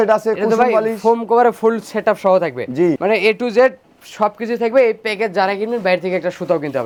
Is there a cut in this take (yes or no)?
no